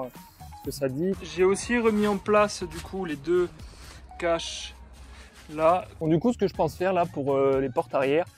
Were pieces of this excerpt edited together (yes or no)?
yes